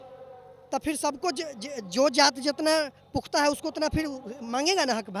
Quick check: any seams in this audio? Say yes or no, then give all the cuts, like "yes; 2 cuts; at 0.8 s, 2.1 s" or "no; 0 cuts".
no; 0 cuts